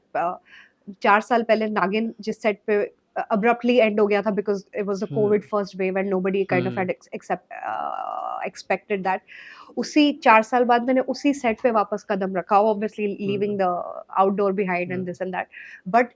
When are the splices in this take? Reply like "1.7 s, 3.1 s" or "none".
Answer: none

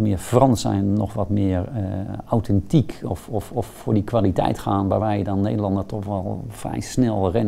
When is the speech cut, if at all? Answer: none

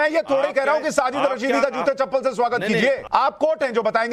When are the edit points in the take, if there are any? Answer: 3.0 s

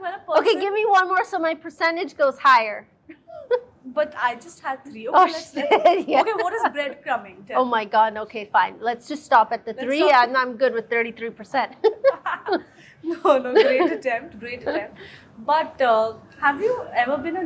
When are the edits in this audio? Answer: none

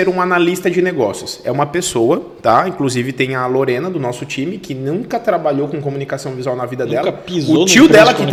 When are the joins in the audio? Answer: none

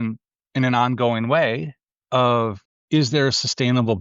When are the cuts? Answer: 2.7 s

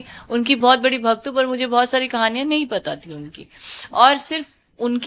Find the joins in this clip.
none

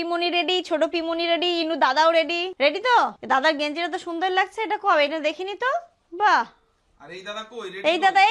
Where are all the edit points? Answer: none

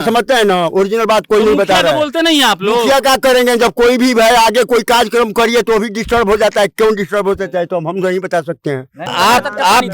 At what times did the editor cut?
9.0 s

